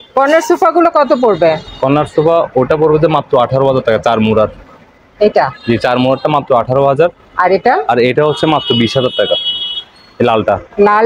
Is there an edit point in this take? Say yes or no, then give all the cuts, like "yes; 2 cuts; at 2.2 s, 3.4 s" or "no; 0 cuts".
no; 0 cuts